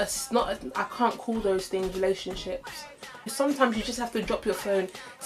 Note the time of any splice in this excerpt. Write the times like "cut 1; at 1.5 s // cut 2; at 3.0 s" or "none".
cut 1; at 3.3 s

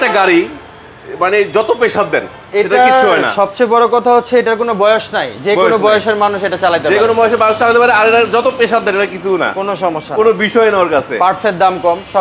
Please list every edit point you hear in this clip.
none

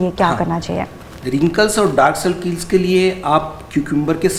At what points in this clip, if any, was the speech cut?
none

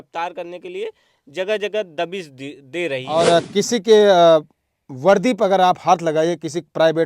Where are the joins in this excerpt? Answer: cut 1; at 3.0 s

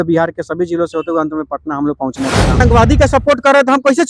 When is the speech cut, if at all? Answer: cut 1; at 2.6 s

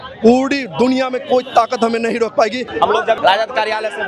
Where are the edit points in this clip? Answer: cut 1; at 2.7 s

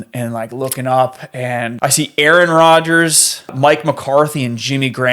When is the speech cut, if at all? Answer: cut 1; at 1.7 s // cut 2; at 3.6 s

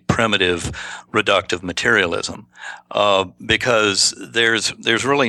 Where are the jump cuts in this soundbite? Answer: none

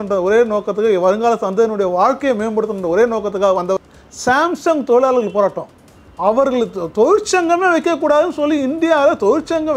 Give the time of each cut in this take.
cut 1; at 3.8 s

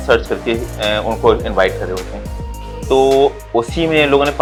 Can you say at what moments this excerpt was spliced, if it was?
none

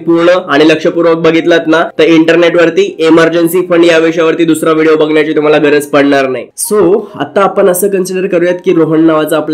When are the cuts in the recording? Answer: cut 1; at 1.9 s // cut 2; at 6.5 s

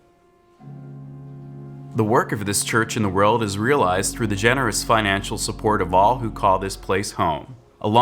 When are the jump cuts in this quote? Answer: cut 1; at 1.9 s

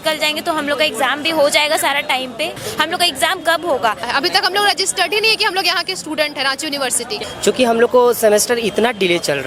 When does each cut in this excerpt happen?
cut 1; at 2.6 s // cut 2; at 4.1 s // cut 3; at 7.2 s

